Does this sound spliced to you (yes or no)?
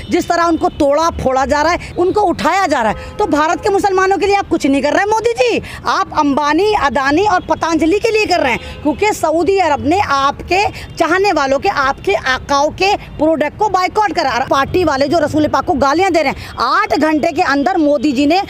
yes